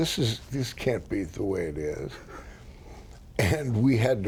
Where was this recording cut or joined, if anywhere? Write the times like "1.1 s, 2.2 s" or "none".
none